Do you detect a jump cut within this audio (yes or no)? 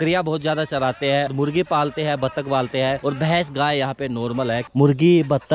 yes